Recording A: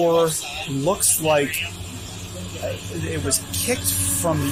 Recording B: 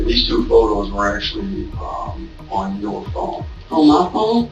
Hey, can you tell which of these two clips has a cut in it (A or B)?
B